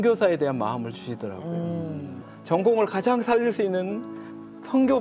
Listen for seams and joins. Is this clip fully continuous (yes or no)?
no